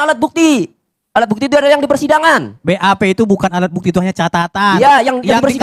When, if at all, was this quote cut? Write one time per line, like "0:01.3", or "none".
none